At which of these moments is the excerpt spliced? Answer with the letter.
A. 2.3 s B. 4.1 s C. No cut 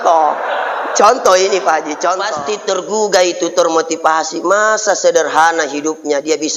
A